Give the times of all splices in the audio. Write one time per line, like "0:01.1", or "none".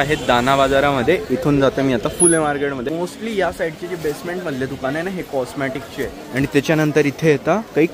0:02.9